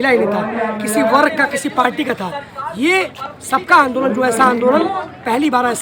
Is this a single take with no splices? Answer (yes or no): yes